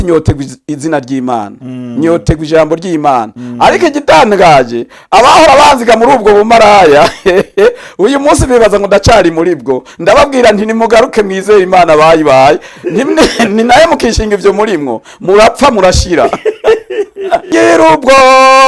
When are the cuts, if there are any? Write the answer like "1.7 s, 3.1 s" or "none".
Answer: 17.5 s